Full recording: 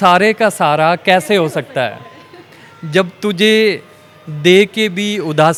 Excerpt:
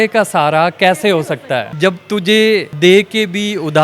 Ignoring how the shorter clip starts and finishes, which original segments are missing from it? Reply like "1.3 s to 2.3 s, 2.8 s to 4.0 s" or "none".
2.0 s to 2.8 s, 3.8 s to 4.3 s